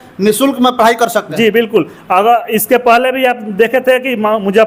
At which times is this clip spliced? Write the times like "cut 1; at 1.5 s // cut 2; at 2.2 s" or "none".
none